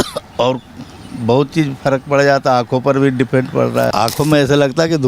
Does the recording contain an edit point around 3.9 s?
yes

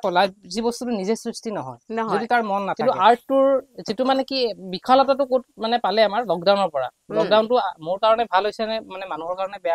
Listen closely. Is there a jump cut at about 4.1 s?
no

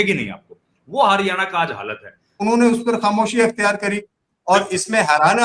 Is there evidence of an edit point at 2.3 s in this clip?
yes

